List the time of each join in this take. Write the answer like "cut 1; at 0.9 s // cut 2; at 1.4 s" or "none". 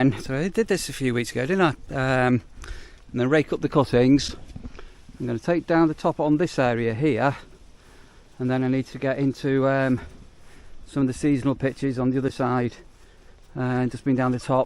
none